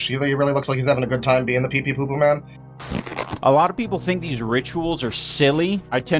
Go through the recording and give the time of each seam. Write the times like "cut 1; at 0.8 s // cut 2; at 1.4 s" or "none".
cut 1; at 2.7 s